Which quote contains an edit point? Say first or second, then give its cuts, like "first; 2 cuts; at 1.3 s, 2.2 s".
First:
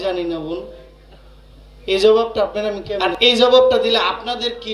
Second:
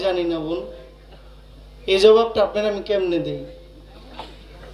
first; 1 cut; at 2.9 s